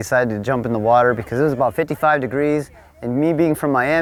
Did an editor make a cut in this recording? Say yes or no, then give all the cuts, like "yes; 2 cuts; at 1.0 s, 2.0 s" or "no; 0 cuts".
no; 0 cuts